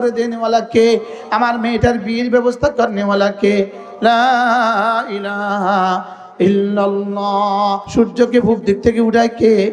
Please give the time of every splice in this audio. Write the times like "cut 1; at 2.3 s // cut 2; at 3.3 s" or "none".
cut 1; at 7.8 s